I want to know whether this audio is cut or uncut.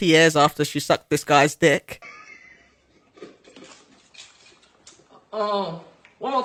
uncut